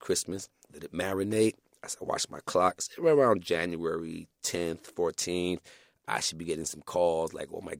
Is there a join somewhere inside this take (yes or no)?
no